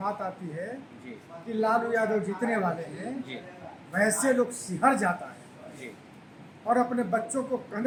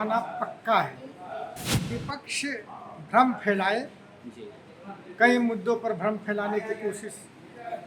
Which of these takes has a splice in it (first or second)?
second